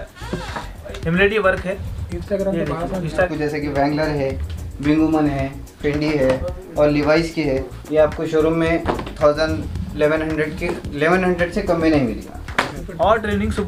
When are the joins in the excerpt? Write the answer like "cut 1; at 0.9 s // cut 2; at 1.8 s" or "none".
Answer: cut 1; at 3.3 s // cut 2; at 7.8 s // cut 3; at 12.6 s